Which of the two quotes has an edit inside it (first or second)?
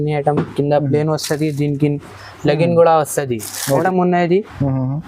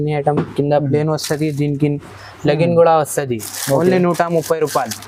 first